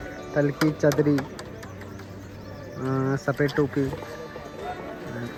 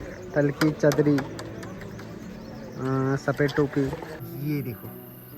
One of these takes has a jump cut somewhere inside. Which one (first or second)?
second